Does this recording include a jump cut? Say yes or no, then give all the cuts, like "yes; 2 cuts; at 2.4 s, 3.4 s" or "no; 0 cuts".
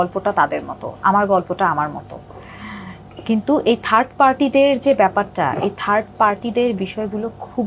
no; 0 cuts